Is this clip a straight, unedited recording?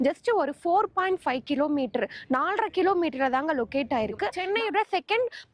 no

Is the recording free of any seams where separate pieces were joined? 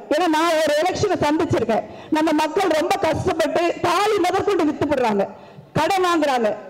yes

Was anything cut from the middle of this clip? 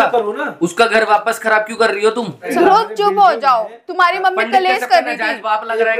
yes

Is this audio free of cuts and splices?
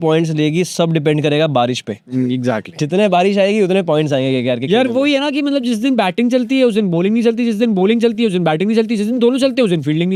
yes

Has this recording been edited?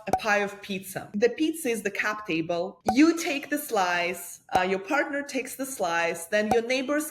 yes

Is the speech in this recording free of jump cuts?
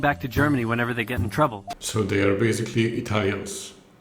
no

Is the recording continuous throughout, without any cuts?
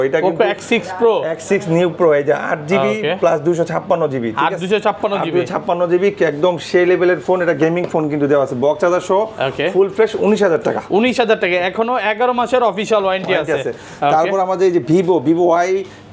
yes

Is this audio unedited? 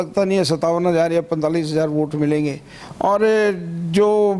yes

